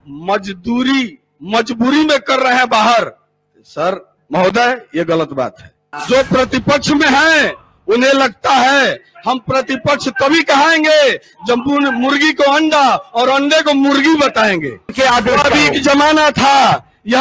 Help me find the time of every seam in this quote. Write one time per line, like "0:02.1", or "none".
0:05.9
0:14.9